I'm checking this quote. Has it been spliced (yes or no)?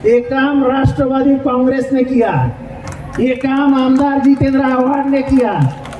no